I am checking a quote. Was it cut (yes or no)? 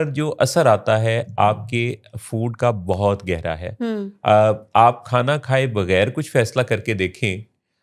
no